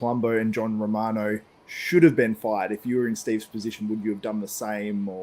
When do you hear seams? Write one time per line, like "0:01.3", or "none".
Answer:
none